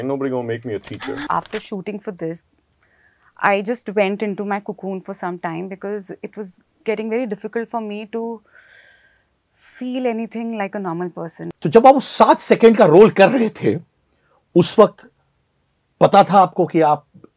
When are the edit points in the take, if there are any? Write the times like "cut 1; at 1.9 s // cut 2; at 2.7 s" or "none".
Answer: cut 1; at 1.3 s // cut 2; at 11.4 s